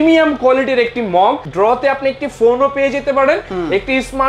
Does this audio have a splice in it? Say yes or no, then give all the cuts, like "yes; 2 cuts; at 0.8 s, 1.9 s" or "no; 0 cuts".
yes; 1 cut; at 1.5 s